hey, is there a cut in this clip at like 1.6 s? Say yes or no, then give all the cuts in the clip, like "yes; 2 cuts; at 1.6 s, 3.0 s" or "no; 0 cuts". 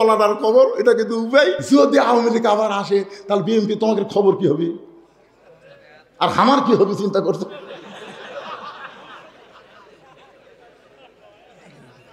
yes; 1 cut; at 1.6 s